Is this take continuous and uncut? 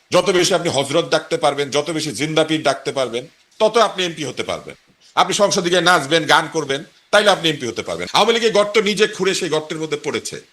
no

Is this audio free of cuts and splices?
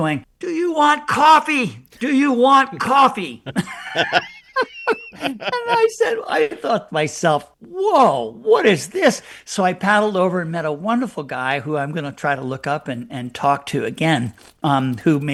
yes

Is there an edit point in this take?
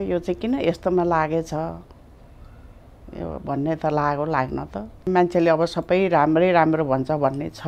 yes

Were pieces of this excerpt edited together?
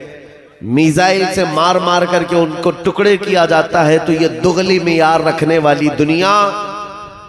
no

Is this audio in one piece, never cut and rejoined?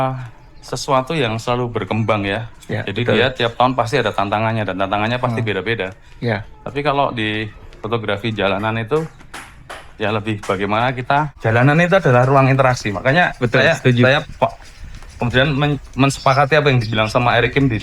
no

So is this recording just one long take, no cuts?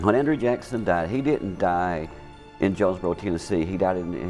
yes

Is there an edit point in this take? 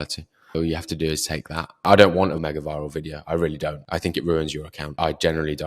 yes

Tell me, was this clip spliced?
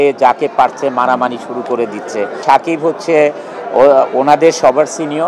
yes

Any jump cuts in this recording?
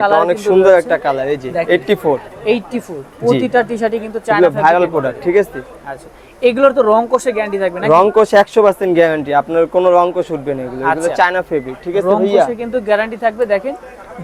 no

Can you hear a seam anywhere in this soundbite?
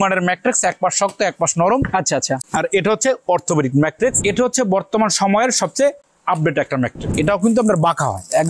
yes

